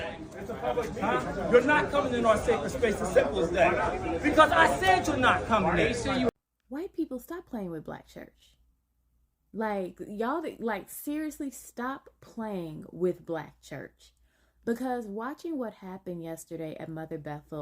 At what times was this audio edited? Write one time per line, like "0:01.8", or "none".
0:06.3